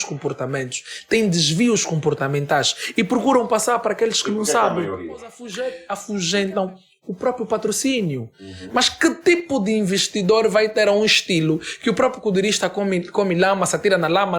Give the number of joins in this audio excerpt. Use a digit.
1